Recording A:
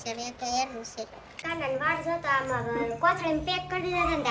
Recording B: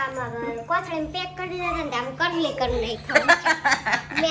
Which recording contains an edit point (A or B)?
A